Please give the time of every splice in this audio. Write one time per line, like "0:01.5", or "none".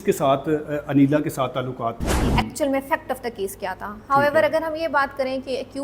0:02.3